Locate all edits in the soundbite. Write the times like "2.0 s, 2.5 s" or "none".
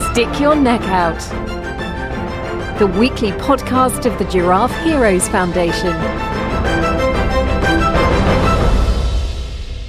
none